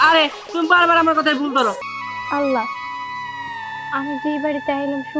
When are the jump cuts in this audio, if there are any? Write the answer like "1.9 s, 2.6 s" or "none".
1.8 s